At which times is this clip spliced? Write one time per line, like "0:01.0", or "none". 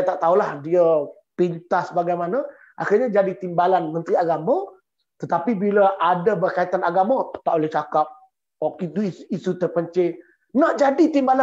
none